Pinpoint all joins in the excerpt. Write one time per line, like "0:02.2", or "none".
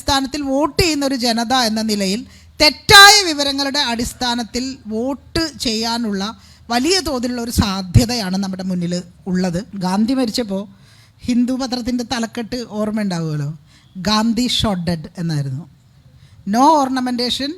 0:09.7